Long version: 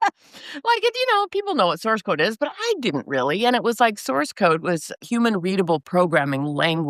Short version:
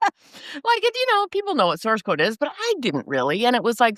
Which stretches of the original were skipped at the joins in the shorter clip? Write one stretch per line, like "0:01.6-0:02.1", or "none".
none